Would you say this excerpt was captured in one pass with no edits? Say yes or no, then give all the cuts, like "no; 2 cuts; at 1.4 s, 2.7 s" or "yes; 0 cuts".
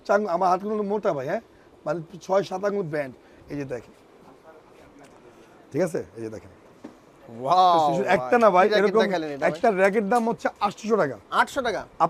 yes; 0 cuts